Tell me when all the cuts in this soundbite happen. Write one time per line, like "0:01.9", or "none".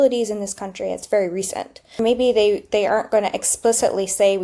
0:02.0

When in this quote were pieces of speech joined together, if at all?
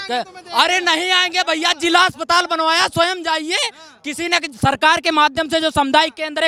none

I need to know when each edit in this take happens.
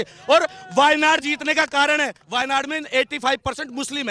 none

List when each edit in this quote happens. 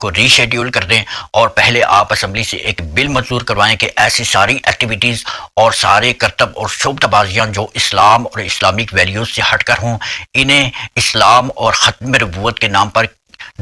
none

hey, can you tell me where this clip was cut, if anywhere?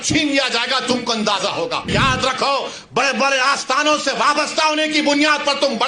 0:01.9

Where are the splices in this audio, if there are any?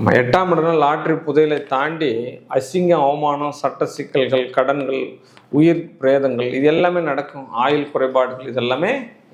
none

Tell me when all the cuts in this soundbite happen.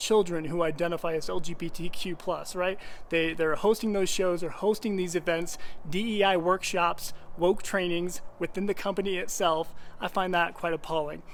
none

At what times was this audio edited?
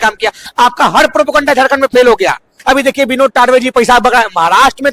0:02.5

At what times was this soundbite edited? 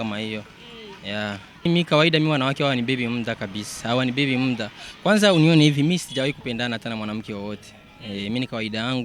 0:01.7

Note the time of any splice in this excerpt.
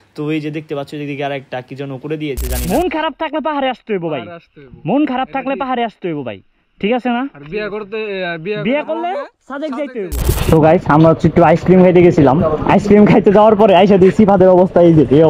0:02.6
0:10.2

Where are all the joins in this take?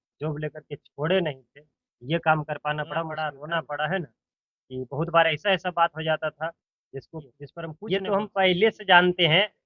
0:03.1
0:07.7

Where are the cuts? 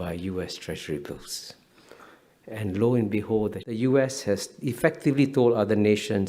0:03.8

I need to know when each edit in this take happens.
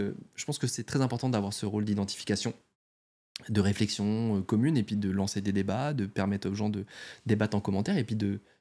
none

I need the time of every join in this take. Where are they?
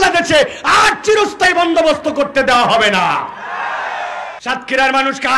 0:04.3

